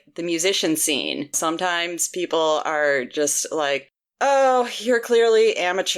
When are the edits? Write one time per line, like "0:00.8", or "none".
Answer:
0:01.4